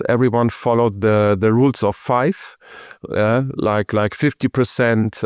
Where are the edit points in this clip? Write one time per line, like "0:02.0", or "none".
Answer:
none